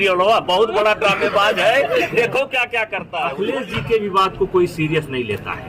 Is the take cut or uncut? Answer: cut